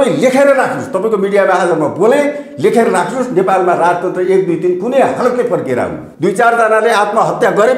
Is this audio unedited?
no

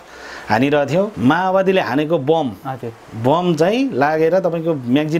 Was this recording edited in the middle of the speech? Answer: yes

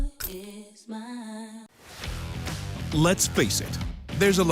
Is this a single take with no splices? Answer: no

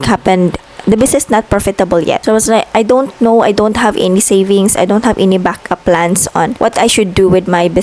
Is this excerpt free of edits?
no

